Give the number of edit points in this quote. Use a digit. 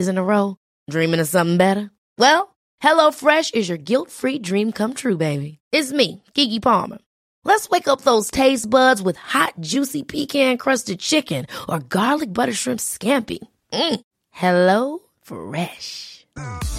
0